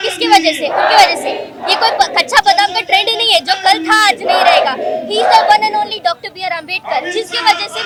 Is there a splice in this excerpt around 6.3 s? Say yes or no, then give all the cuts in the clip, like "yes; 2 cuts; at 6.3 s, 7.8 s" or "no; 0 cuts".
no; 0 cuts